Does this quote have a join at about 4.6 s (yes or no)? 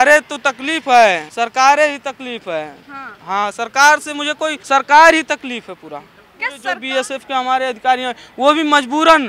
yes